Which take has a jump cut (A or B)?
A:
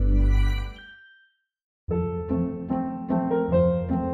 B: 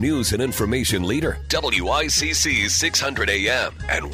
A